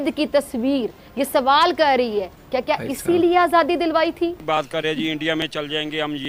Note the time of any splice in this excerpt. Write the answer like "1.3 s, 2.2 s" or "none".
4.4 s